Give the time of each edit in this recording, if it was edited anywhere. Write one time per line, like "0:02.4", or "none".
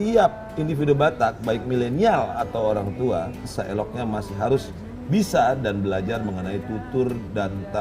0:03.5

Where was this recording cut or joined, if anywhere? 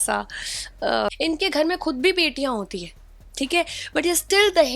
0:01.1

